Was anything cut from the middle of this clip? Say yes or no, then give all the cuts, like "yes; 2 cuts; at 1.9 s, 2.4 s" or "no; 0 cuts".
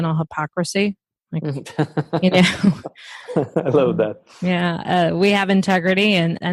no; 0 cuts